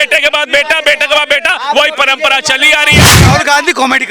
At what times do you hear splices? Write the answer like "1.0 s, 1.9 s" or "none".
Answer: 3.1 s